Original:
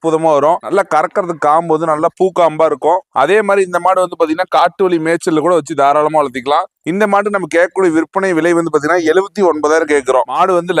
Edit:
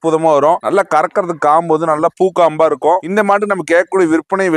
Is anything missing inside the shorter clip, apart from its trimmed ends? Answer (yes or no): yes